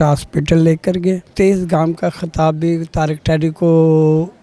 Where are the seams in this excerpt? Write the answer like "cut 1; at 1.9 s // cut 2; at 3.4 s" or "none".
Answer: cut 1; at 1.3 s